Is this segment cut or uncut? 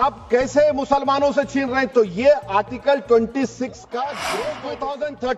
cut